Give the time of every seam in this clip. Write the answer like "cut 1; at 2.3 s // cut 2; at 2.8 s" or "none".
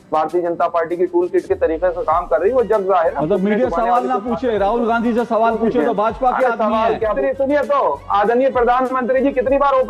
cut 1; at 7.2 s